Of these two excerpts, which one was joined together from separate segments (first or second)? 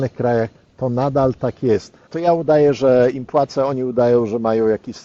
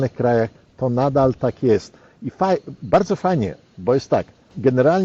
first